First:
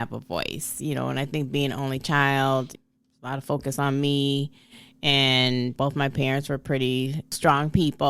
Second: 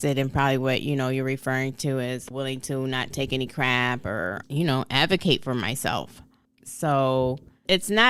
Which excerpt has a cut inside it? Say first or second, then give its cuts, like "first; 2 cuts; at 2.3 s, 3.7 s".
first; 1 cut; at 2.8 s